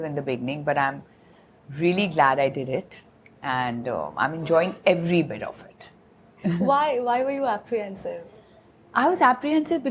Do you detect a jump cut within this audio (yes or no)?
no